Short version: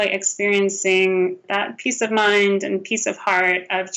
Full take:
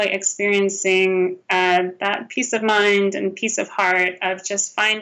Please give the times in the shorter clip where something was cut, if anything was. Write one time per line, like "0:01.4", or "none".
0:01.4